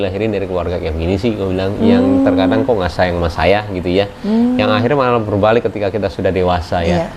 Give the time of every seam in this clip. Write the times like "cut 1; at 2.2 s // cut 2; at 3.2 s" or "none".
none

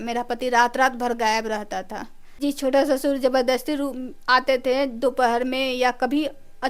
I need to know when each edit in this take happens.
cut 1; at 2.2 s

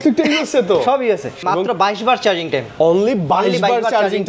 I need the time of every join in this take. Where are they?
cut 1; at 1.4 s

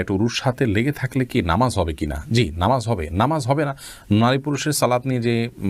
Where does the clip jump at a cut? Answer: none

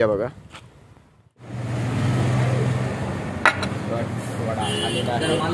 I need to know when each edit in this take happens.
cut 1; at 1.3 s

